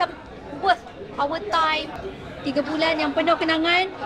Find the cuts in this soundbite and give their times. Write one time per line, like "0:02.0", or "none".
0:02.0

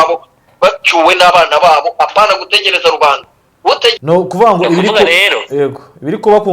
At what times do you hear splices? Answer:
0:04.0

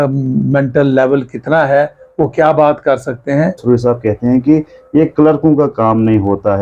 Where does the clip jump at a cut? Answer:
0:03.6

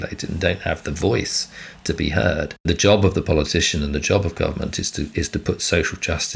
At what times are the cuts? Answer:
0:02.6

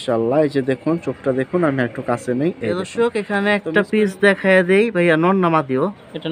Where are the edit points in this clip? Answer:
0:02.9

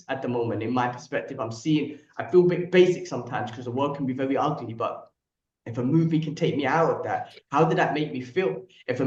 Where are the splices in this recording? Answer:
none

